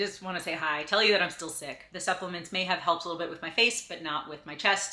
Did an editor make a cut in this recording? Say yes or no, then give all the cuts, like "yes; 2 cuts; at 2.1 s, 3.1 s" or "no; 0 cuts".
no; 0 cuts